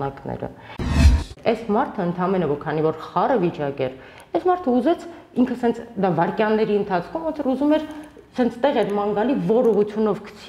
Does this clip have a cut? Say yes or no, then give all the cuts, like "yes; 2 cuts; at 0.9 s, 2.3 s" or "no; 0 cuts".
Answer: yes; 1 cut; at 1.0 s